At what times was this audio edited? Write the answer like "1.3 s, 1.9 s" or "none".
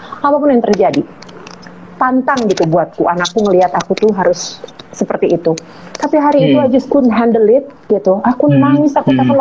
none